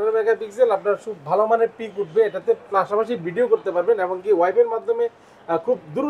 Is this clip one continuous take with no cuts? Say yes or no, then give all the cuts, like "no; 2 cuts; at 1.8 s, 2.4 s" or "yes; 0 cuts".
yes; 0 cuts